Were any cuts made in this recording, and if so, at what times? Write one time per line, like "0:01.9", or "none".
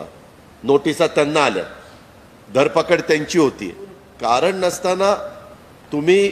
0:04.1